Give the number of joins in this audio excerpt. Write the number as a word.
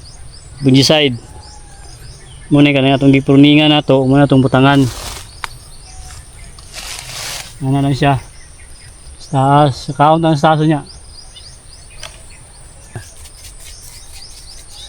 one